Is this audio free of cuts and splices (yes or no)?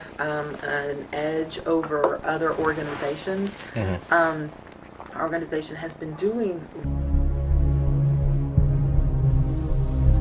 yes